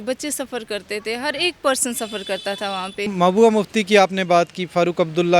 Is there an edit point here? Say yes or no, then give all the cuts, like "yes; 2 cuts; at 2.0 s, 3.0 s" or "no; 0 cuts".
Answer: yes; 1 cut; at 3.1 s